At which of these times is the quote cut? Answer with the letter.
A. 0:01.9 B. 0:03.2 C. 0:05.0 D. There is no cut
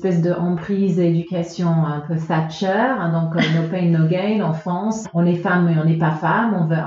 C